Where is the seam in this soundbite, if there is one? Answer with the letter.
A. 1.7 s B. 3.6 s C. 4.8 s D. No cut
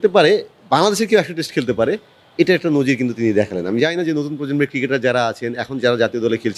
D